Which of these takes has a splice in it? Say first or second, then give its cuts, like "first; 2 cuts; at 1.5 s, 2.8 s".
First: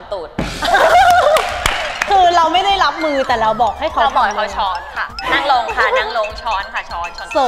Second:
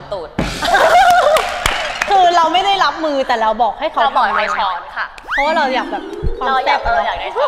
first; 1 cut; at 5.2 s